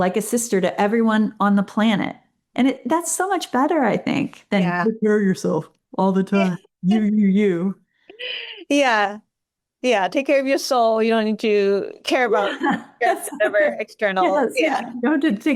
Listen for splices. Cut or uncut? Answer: uncut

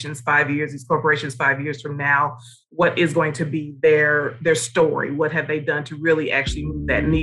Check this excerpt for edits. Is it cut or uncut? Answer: uncut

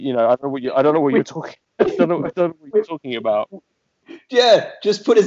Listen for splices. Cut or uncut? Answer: uncut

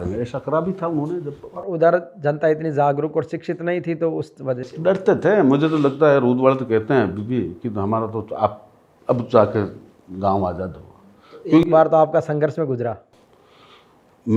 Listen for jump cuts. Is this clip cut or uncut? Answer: uncut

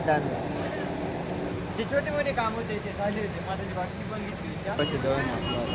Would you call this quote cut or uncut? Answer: cut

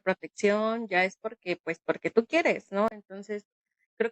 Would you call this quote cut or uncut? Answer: uncut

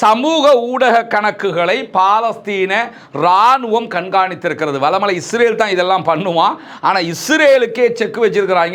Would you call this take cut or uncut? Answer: uncut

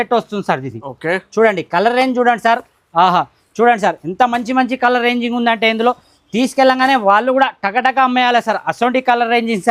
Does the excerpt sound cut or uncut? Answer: uncut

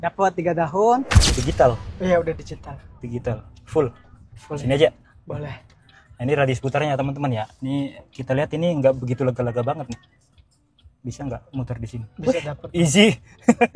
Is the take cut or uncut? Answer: cut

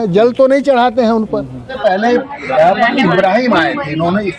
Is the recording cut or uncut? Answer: cut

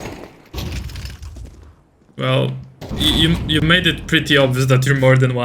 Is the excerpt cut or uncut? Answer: cut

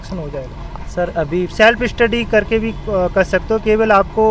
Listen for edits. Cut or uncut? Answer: cut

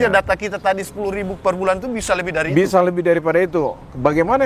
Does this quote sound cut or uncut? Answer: uncut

